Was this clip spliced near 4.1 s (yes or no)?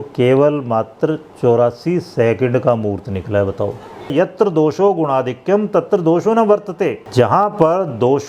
yes